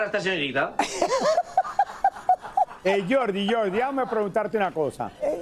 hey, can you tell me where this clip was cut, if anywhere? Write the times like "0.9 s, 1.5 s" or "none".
none